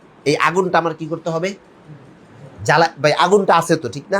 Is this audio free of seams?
yes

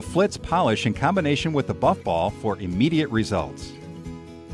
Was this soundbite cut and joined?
yes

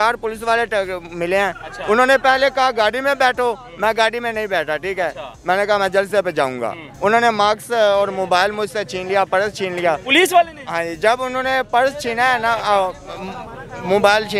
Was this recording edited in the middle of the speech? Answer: no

